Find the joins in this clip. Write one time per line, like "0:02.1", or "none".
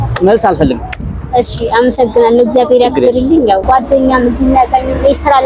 0:03.6